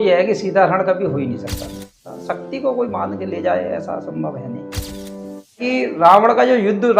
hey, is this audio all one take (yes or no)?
no